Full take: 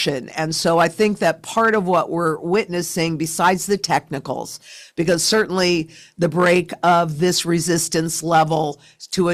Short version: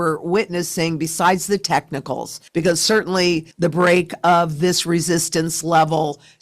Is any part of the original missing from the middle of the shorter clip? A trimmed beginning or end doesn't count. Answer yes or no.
yes